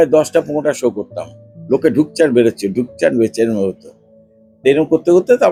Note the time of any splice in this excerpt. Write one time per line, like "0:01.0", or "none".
none